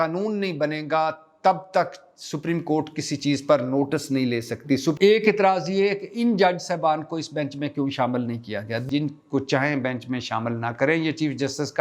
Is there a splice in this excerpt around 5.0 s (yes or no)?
yes